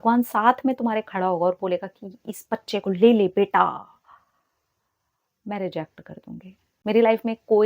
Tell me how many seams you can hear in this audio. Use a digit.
1